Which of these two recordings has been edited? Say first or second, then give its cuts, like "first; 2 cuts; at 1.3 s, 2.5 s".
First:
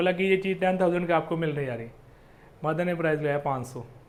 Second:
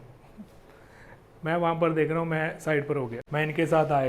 second; 1 cut; at 3.2 s